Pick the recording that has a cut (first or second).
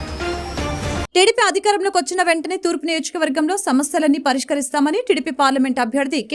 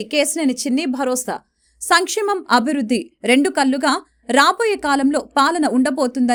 first